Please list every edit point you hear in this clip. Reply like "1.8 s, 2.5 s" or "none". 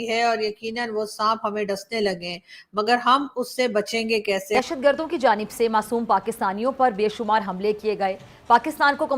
4.5 s